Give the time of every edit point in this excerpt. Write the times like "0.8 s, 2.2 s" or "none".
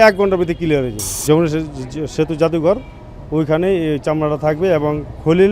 1.0 s